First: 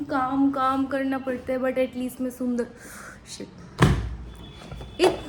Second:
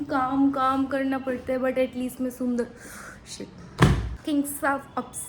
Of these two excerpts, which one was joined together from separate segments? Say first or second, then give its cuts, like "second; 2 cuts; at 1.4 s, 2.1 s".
second; 1 cut; at 4.1 s